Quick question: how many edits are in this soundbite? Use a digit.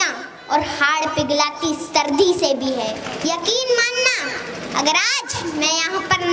1